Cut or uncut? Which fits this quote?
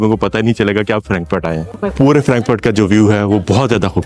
cut